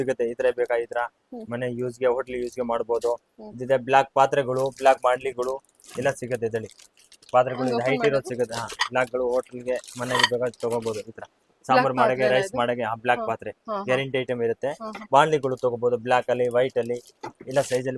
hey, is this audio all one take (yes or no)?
yes